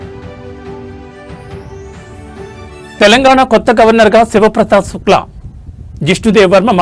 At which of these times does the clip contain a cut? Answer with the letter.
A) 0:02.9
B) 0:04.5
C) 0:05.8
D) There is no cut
A